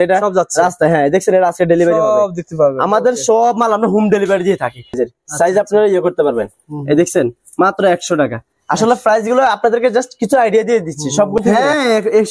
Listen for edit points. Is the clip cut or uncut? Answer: cut